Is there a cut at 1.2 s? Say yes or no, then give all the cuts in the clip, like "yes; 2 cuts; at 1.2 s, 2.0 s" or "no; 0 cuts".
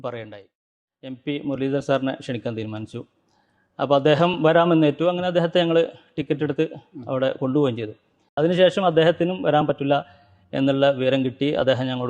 yes; 1 cut; at 1.2 s